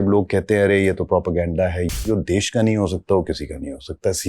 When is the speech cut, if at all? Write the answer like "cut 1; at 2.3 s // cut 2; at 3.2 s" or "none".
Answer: cut 1; at 2.0 s